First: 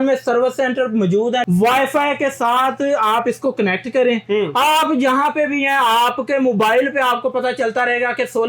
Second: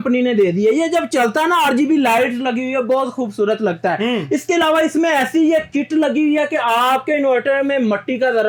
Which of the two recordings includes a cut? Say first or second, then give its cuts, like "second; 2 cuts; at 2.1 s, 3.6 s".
first; 1 cut; at 1.4 s